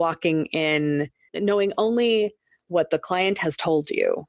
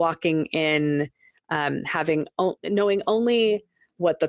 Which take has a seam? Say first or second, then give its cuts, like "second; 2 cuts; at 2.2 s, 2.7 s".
first; 1 cut; at 1.3 s